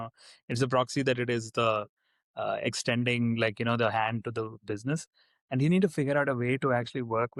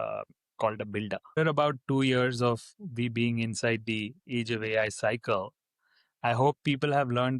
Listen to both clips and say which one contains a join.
second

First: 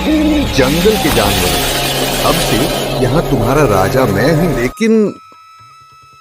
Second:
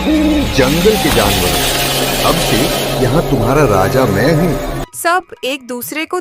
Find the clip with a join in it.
first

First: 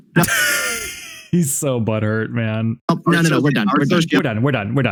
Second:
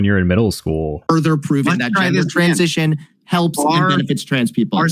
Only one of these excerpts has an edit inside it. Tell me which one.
second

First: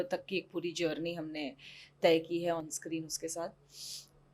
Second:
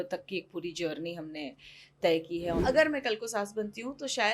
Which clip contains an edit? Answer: second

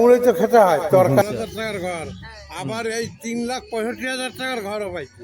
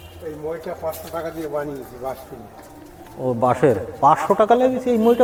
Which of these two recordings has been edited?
first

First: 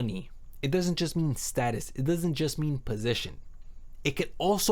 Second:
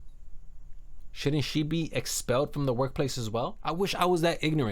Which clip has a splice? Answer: second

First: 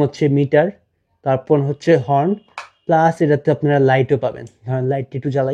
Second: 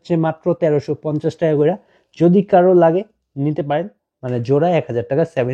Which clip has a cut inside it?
second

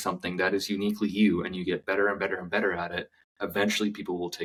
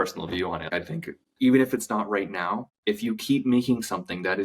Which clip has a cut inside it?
second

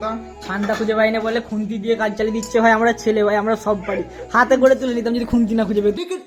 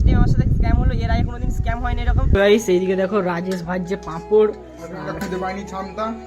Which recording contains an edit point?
second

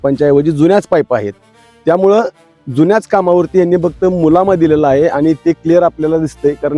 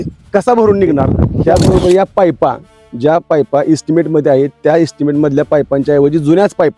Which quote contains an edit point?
second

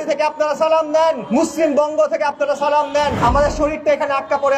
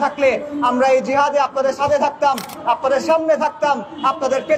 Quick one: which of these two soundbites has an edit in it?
first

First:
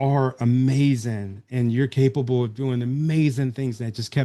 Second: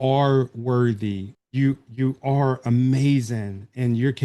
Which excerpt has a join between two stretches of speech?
second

